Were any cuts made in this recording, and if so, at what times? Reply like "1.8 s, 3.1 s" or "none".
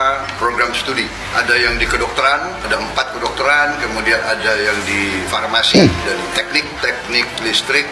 none